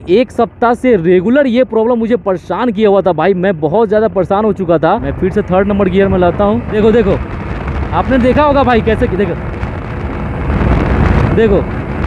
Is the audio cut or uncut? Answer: cut